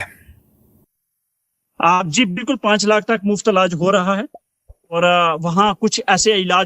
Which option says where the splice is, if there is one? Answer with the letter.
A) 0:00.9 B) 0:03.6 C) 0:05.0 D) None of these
C